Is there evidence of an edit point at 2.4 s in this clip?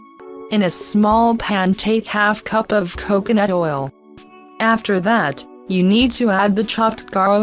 yes; 1 cut; at 2.4 s

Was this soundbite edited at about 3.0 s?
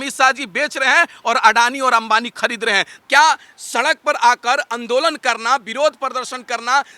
yes; 1 cut; at 3.0 s

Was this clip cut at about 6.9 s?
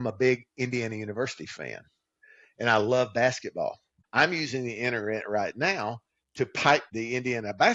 yes; 2 cuts; at 3.9 s, 6.9 s

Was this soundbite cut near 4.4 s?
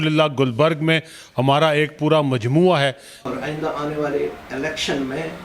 no; 1 cut; at 3.1 s

